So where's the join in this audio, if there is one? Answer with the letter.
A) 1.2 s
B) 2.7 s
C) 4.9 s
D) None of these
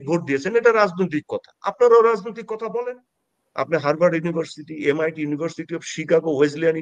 B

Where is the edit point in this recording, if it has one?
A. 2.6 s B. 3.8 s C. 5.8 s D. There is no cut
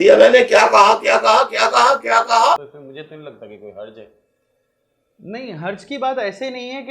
D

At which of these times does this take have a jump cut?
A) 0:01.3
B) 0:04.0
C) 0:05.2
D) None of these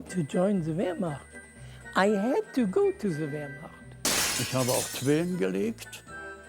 B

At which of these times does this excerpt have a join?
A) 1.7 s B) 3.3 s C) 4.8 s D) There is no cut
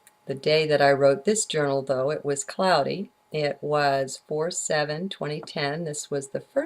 A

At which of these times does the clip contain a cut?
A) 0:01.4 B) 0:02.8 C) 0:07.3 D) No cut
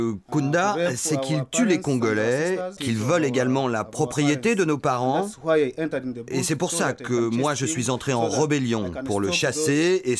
B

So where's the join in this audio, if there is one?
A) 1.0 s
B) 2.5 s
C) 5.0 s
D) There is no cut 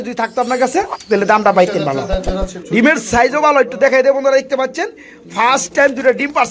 B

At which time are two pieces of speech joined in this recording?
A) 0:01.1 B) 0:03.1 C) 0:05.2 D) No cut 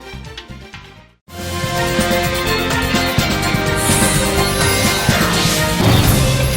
A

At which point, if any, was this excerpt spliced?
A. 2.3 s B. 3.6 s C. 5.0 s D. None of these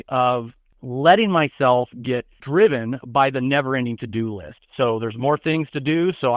A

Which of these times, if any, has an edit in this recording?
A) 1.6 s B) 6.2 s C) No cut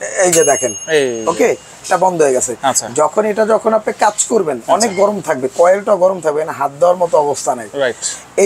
C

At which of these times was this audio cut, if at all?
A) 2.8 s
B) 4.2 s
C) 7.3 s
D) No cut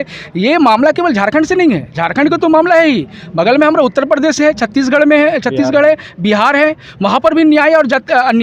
D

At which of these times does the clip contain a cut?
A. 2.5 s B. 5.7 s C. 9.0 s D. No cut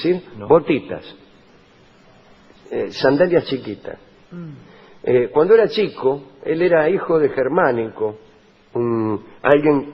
D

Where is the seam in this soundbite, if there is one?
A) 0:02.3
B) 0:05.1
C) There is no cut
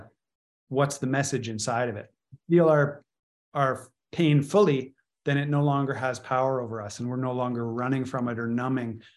A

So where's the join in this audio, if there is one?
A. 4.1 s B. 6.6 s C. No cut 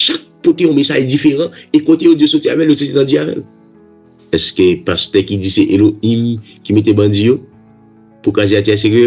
A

